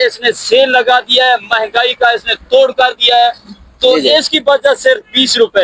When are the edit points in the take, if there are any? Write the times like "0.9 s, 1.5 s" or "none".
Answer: none